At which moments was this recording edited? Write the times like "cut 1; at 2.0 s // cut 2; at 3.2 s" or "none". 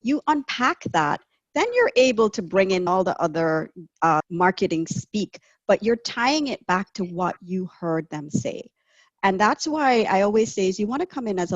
cut 1; at 2.9 s // cut 2; at 4.3 s